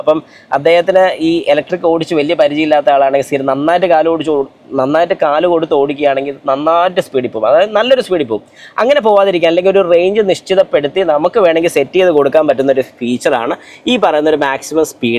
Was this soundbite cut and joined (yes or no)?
no